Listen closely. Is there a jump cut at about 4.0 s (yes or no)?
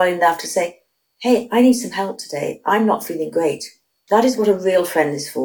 yes